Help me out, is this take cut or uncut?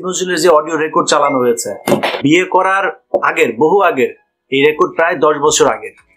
cut